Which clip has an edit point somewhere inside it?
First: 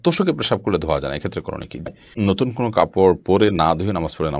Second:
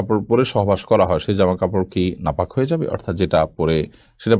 first; 1 cut; at 1.9 s

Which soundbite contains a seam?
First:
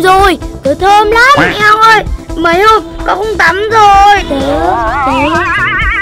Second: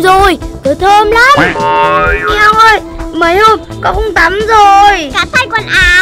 first; 2 cuts; at 1.5 s, 4.2 s

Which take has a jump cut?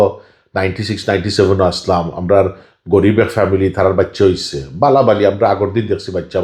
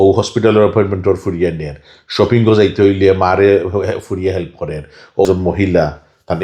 second; 1 cut; at 5.2 s

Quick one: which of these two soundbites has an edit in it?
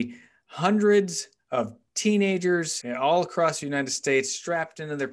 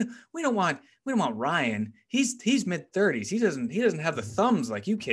first; 1 cut; at 2.8 s

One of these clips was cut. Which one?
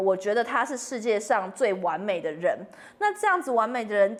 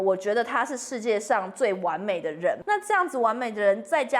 second; 1 cut; at 2.6 s

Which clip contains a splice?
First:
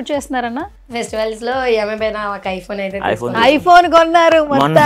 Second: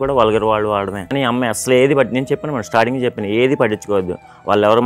second; 1 cut; at 1.0 s

